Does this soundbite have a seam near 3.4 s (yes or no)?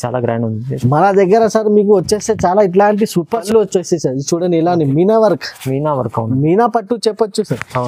yes